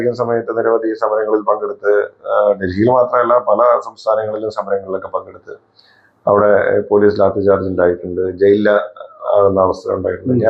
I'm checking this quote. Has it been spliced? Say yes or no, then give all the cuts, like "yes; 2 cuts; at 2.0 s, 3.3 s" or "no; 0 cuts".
no; 0 cuts